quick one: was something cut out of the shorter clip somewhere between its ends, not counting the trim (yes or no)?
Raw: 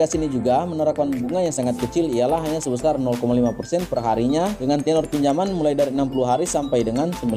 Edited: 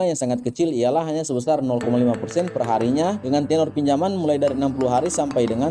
no